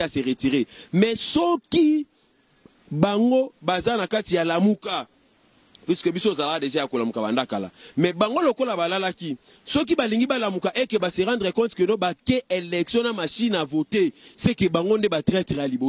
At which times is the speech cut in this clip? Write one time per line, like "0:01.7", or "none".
none